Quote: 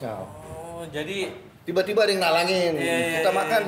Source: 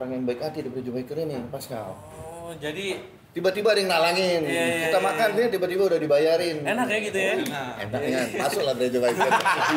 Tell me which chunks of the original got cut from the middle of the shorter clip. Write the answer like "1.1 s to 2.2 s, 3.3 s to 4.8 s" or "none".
none